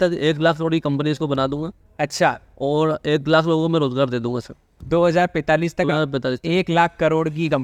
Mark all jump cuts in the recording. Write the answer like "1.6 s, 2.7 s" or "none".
none